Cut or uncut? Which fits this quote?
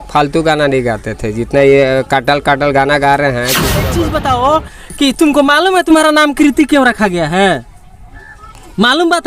cut